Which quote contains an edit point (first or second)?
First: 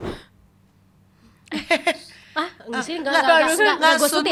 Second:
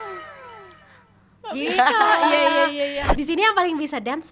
second